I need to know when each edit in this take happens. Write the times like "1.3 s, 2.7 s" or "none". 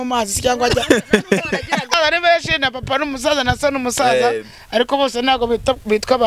1.9 s